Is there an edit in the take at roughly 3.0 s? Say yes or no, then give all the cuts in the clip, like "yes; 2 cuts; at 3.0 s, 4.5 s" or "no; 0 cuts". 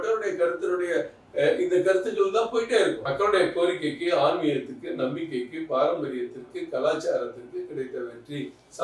yes; 1 cut; at 3.0 s